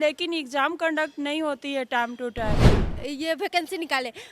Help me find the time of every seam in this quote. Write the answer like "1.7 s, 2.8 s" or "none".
2.8 s